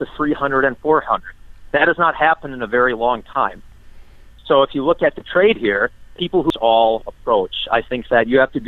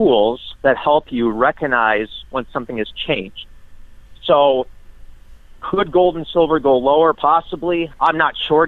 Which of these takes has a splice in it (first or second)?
first